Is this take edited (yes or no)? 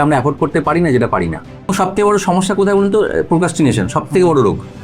yes